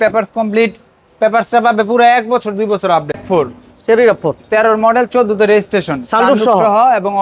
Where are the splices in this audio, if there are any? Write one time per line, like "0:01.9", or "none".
0:03.2

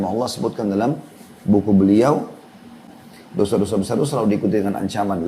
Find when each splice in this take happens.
0:02.8

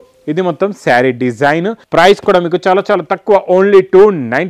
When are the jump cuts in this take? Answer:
0:01.8

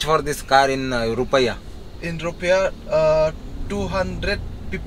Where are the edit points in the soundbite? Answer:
none

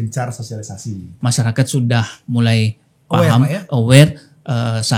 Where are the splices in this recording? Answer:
0:01.1

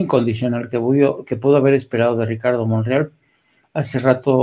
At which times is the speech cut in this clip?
none

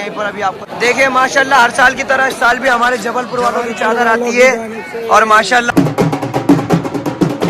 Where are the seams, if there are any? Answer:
0:05.7

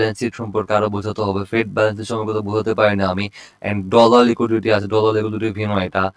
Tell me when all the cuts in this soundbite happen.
none

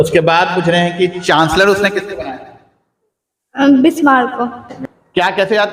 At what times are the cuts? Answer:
0:04.7

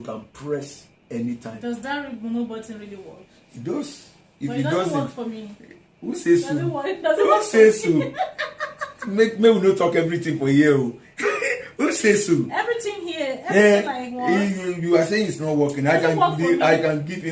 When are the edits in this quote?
none

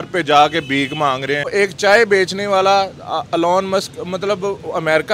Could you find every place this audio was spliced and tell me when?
0:01.5

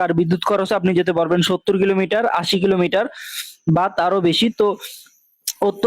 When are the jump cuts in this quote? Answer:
0:01.9

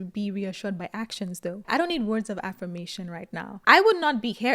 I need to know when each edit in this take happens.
0:01.6
0:03.5

